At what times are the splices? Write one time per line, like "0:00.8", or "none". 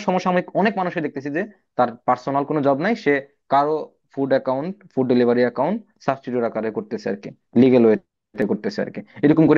none